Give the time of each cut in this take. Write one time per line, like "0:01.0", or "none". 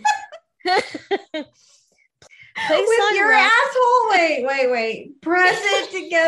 0:02.1